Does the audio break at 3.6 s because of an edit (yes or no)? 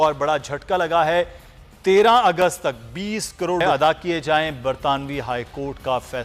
yes